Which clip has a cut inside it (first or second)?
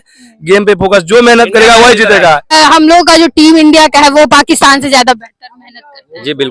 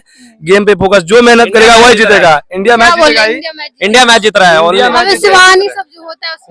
first